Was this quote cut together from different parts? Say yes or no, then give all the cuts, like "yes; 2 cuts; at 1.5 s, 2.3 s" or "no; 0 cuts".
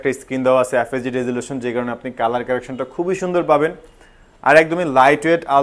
no; 0 cuts